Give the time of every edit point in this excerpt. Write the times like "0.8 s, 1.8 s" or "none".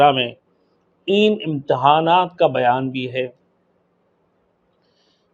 none